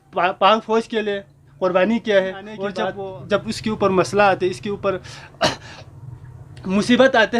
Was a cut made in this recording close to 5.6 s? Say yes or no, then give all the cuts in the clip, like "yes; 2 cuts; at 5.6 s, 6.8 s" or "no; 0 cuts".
no; 1 cut; at 2.9 s